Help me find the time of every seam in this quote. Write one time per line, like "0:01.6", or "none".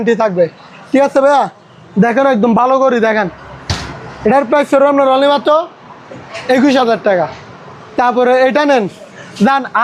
none